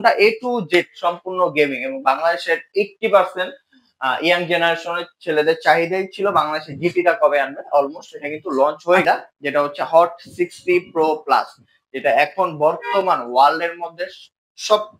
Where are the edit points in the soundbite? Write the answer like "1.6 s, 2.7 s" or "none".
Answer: 9.0 s